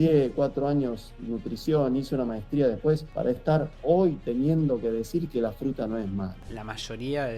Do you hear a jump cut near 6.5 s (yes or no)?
yes